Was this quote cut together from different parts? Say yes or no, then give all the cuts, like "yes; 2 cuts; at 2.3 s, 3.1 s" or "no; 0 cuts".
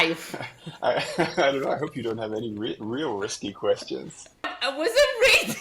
yes; 1 cut; at 4.6 s